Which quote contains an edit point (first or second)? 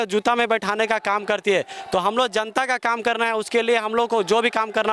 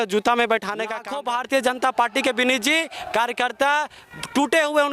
second